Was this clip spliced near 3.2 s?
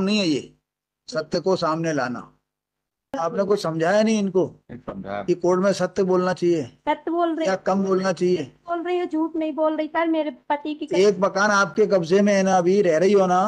yes; 1 cut; at 3.2 s

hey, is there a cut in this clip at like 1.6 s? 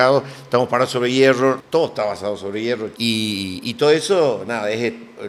yes; 2 cuts; at 1.6 s, 2.9 s

